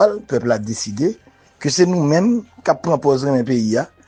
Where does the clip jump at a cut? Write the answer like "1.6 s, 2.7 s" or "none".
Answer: none

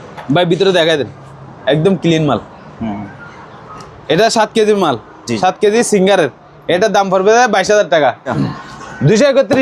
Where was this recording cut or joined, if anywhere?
8.2 s

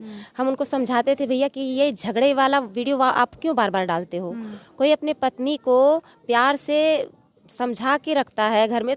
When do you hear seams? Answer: none

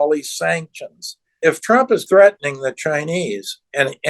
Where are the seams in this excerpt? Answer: 1.7 s

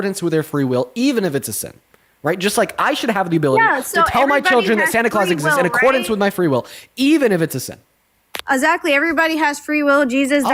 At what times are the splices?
none

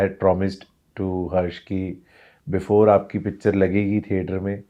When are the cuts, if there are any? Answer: none

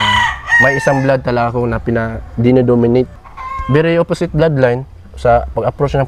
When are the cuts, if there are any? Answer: 3.4 s

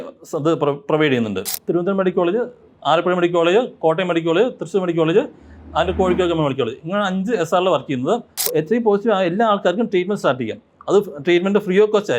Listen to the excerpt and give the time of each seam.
1.5 s, 8.4 s

